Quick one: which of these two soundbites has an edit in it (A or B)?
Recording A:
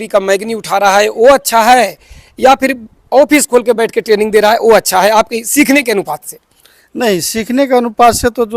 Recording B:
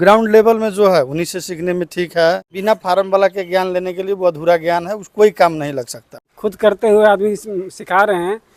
B